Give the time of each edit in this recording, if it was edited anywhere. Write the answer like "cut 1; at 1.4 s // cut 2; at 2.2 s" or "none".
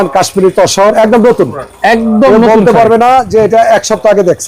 cut 1; at 0.9 s